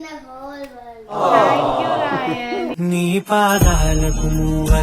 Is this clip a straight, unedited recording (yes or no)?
no